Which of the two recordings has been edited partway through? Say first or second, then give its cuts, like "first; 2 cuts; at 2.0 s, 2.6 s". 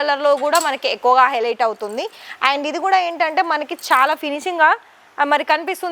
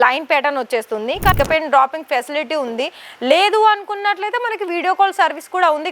second; 1 cut; at 1.4 s